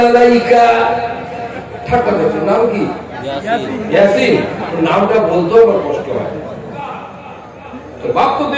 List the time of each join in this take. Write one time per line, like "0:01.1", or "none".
0:07.3